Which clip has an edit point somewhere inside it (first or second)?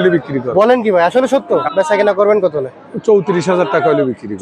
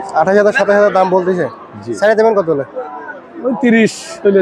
first